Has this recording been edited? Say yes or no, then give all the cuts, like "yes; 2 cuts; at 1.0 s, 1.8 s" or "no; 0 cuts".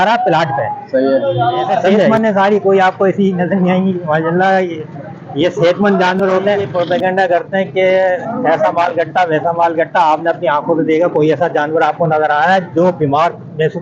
yes; 2 cuts; at 2.1 s, 6.7 s